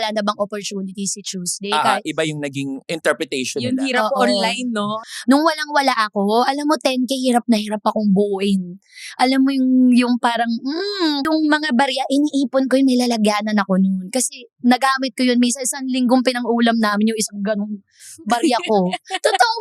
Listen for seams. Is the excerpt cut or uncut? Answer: cut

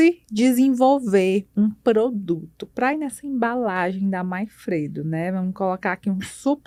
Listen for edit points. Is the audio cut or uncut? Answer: uncut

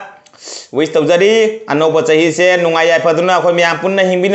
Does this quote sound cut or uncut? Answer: uncut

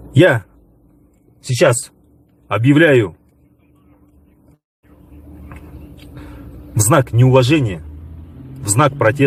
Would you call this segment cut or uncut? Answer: uncut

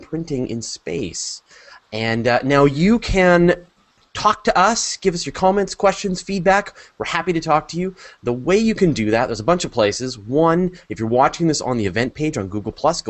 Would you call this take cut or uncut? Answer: uncut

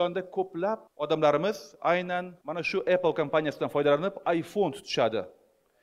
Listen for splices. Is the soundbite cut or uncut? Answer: cut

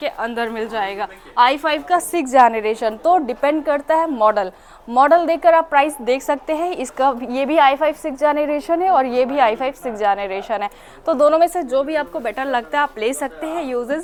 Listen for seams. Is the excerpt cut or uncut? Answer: uncut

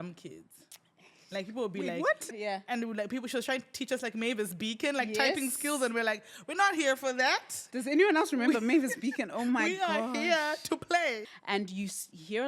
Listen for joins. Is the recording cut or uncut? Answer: cut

